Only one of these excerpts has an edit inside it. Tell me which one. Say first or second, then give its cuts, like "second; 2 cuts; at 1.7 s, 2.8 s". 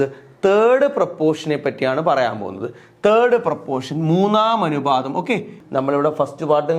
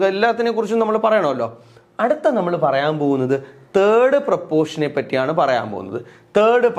first; 1 cut; at 5.6 s